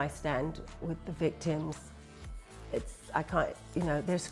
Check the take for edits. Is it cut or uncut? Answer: uncut